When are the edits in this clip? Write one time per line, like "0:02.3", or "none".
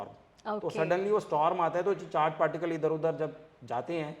none